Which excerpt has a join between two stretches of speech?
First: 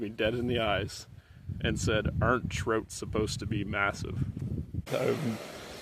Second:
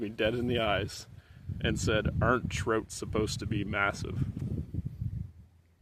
first; 1 cut; at 4.9 s

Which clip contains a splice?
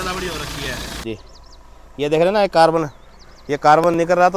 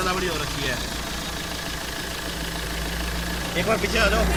first; 1 cut; at 1.0 s

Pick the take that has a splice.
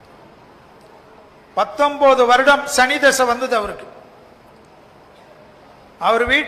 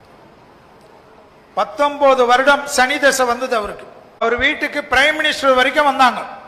second; 1 cut; at 4.2 s

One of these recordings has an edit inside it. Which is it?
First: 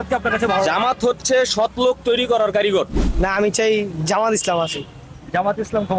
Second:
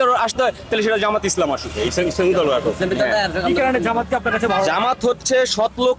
first; 1 cut; at 3.1 s

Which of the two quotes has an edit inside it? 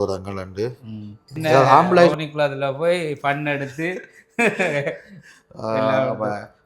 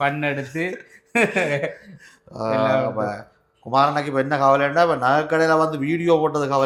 first; 1 cut; at 2.1 s

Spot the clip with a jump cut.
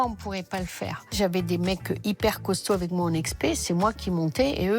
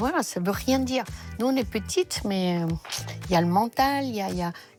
first; 1 cut; at 1.1 s

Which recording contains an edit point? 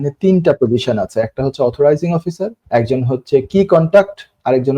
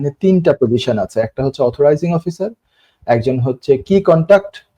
first; 1 cut; at 2.5 s

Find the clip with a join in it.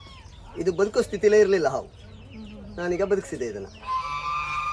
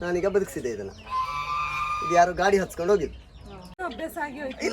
second; 1 cut; at 3.8 s

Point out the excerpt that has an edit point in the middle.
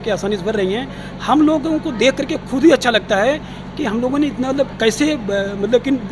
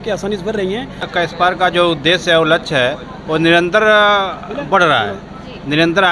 second; 1 cut; at 1.1 s

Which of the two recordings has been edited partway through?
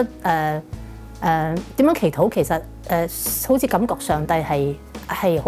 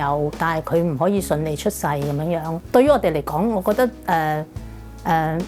second; 1 cut; at 2.5 s

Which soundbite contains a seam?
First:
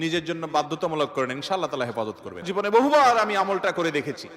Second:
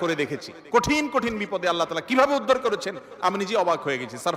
first; 1 cut; at 2.4 s

